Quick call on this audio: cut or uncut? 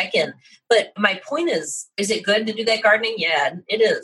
cut